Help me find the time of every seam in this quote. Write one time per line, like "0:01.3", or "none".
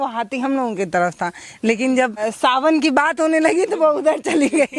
0:02.3